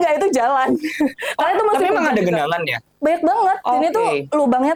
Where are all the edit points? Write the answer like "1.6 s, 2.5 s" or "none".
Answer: none